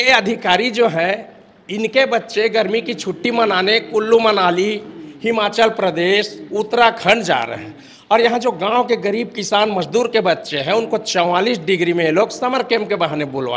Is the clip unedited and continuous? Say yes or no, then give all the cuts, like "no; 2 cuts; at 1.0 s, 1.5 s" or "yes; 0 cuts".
yes; 0 cuts